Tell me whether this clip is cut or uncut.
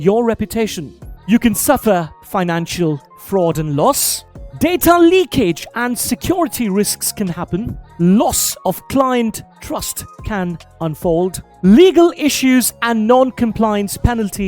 uncut